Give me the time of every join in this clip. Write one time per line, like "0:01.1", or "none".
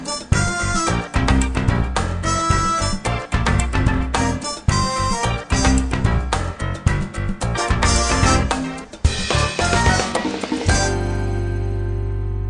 none